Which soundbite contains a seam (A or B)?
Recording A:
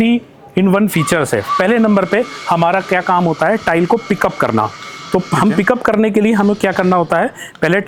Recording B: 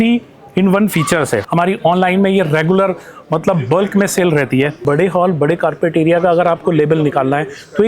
B